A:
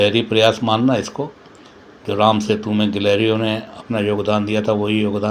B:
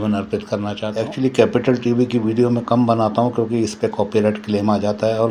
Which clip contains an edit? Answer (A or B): B